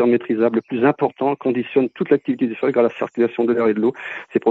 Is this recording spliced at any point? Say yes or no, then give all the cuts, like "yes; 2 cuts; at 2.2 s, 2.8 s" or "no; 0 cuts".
no; 0 cuts